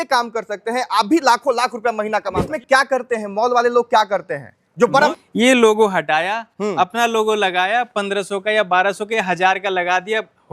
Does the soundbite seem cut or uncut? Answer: cut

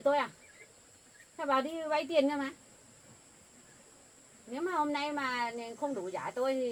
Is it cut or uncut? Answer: uncut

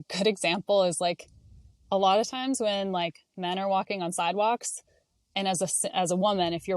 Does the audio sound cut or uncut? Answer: uncut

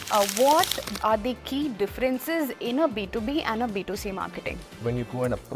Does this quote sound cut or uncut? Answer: cut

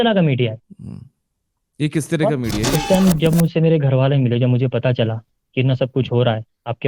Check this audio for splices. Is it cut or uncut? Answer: cut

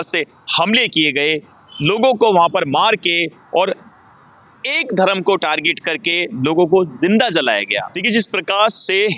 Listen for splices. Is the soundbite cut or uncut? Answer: cut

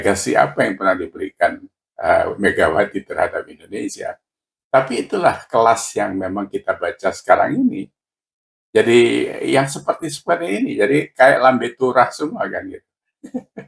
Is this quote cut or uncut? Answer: uncut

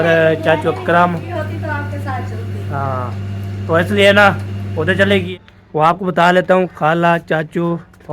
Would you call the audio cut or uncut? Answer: cut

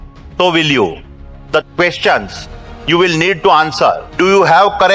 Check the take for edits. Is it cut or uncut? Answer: cut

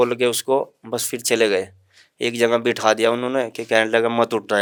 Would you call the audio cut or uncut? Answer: uncut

